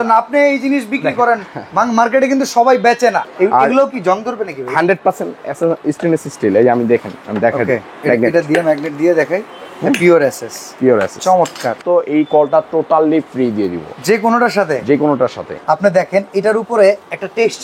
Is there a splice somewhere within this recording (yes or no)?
yes